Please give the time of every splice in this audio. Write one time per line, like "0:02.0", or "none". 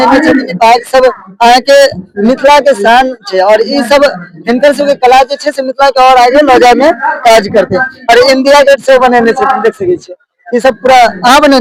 none